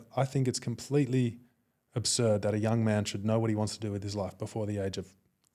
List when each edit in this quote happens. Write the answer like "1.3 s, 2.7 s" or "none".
none